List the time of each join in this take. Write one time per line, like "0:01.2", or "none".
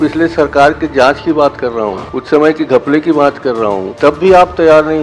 0:02.1
0:03.9